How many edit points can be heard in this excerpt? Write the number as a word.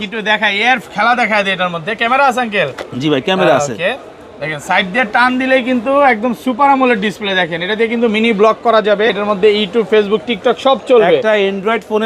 one